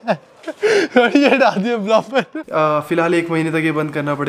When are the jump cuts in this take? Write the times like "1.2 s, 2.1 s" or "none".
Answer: 2.4 s